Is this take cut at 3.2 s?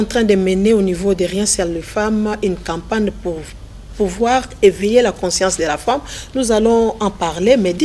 no; 0 cuts

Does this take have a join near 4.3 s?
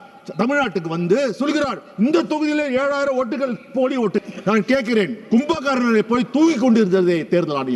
yes; 1 cut; at 4.3 s

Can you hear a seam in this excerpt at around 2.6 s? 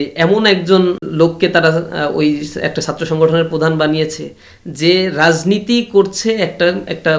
no; 1 cut; at 1.0 s

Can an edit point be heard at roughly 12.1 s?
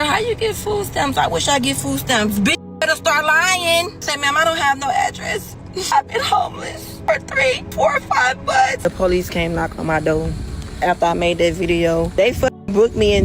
yes; 6 cuts; at 4.1 s, 5.9 s, 6.9 s, 7.7 s, 8.8 s, 12.1 s

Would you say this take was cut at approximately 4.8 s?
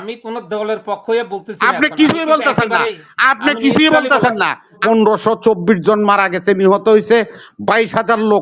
yes; 1 cut; at 4.8 s

